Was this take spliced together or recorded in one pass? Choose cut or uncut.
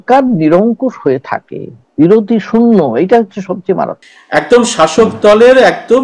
cut